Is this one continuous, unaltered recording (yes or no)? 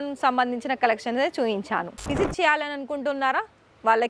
no